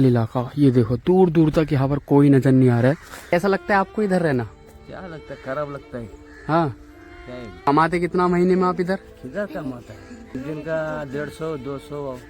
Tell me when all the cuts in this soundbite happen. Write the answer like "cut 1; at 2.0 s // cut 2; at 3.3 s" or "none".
cut 1; at 3.3 s // cut 2; at 7.7 s // cut 3; at 10.3 s